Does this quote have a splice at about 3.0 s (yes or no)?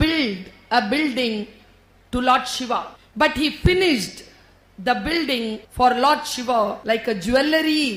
yes